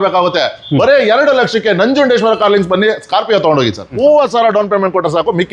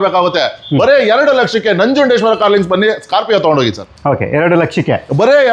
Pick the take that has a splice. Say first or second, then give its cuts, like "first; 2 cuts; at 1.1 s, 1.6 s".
first; 1 cut; at 3.9 s